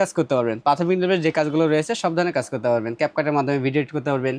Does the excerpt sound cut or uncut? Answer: uncut